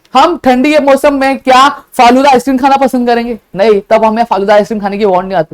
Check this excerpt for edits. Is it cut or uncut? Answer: uncut